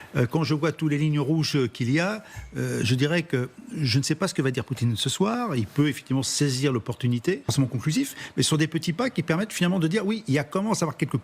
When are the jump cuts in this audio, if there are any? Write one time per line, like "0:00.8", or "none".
0:07.5